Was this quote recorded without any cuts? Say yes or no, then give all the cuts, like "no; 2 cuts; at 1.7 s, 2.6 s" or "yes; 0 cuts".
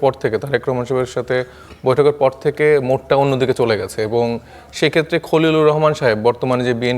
yes; 0 cuts